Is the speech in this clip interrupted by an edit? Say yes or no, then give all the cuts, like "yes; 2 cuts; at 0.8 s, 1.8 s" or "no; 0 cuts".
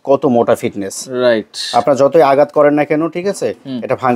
no; 0 cuts